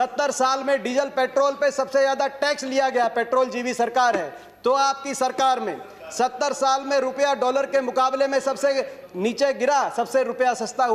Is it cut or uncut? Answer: uncut